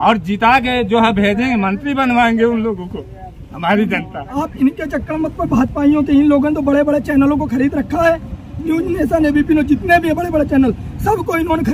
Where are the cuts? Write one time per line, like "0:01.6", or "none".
0:04.3